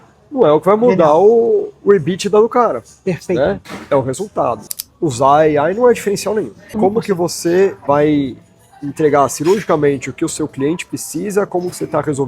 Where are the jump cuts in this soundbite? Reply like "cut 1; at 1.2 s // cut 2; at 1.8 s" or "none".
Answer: cut 1; at 4.7 s // cut 2; at 6.8 s // cut 3; at 7.8 s